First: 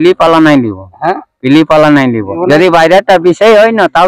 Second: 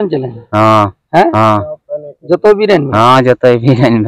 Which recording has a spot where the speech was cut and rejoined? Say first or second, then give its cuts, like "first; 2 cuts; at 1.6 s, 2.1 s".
first; 1 cut; at 2.3 s